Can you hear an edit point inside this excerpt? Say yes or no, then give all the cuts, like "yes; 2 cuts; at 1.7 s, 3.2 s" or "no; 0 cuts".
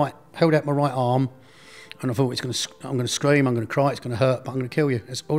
no; 0 cuts